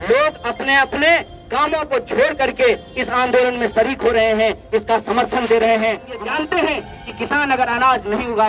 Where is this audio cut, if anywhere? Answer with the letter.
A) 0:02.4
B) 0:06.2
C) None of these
B